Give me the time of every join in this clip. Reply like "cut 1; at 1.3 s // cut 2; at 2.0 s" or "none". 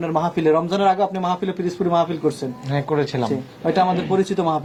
none